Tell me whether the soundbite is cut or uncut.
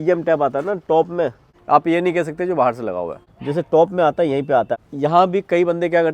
cut